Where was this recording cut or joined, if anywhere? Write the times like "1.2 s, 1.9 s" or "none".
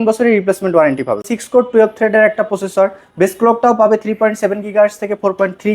1.3 s